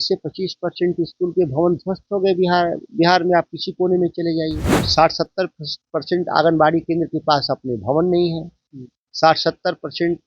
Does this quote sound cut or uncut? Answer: cut